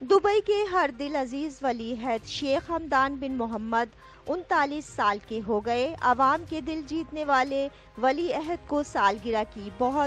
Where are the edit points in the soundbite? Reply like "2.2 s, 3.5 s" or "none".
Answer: none